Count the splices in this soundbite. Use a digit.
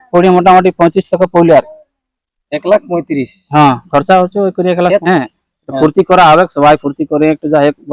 1